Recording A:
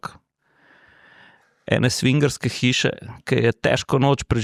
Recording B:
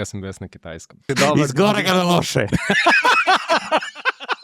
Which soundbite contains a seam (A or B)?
B